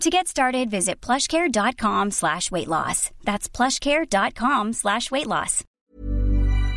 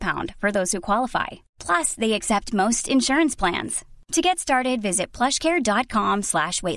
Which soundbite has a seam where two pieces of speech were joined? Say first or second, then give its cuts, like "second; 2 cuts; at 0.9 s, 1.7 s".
first; 1 cut; at 5.6 s